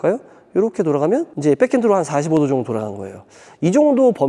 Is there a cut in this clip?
yes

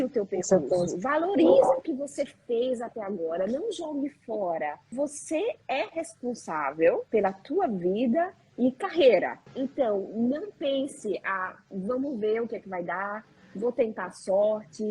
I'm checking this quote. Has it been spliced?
yes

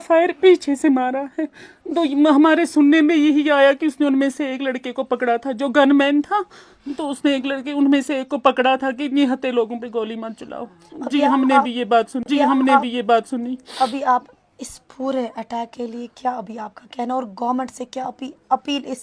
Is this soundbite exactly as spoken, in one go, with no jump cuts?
yes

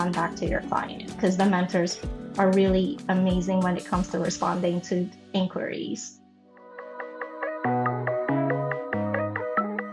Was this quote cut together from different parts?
no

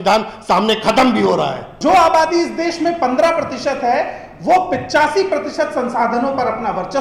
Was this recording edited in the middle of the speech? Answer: yes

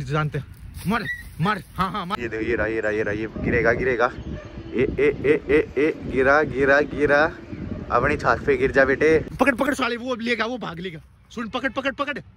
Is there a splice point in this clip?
yes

